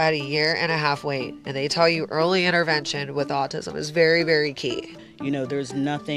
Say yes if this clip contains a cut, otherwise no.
yes